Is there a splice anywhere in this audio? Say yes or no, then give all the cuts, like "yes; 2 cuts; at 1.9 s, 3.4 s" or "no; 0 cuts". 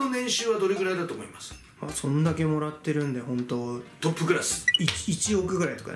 no; 0 cuts